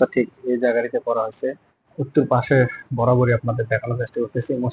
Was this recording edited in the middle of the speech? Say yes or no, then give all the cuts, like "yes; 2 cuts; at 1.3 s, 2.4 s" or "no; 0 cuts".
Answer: yes; 1 cut; at 1.9 s